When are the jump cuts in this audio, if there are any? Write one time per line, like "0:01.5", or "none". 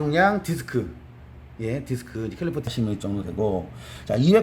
0:02.6